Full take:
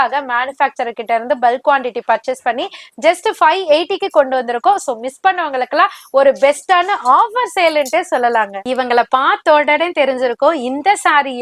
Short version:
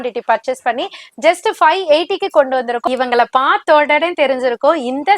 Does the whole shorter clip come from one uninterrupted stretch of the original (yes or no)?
no